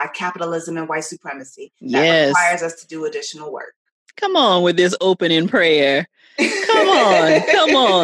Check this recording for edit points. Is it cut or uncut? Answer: uncut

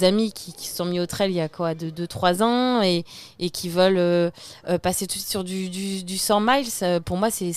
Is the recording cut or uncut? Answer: uncut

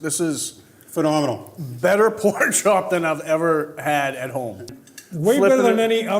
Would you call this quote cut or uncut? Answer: cut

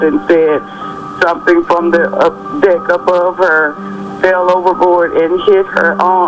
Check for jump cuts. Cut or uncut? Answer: uncut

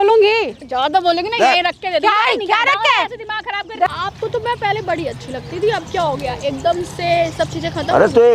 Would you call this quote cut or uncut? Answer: cut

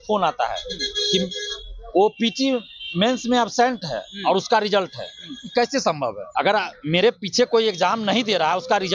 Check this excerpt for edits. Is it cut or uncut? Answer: cut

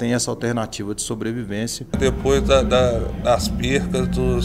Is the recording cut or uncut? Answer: cut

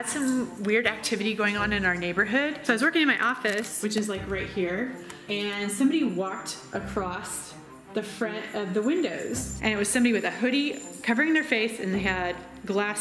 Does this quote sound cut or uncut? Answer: cut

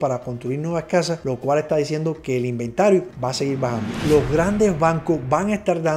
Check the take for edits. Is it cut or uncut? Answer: cut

